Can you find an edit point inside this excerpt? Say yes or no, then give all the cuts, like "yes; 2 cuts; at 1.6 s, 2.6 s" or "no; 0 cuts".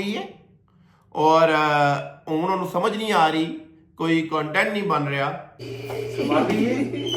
yes; 1 cut; at 5.6 s